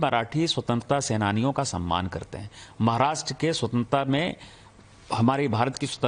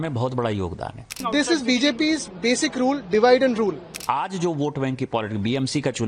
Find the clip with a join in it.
second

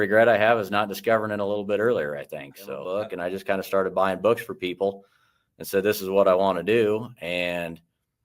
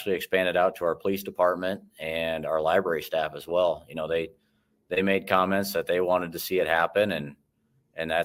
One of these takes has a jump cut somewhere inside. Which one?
first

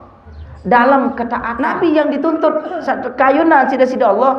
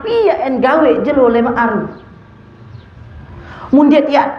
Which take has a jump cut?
first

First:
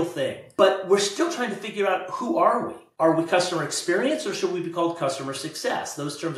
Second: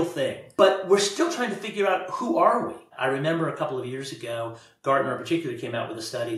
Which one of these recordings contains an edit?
second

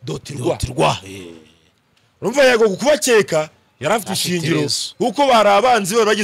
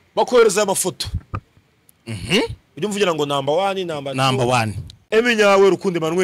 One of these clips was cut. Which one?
second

